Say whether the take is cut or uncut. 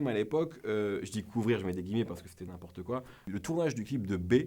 cut